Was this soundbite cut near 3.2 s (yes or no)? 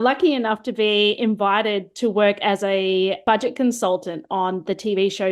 yes